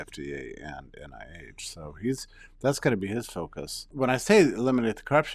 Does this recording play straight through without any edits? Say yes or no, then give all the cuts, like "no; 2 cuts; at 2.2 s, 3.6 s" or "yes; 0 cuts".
no; 1 cut; at 3.9 s